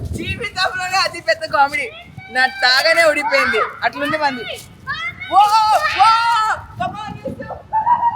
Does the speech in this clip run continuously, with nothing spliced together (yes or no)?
yes